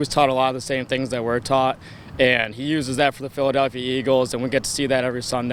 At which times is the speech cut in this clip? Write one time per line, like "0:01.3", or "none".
none